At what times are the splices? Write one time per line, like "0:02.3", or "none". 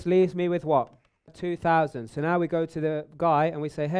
0:01.3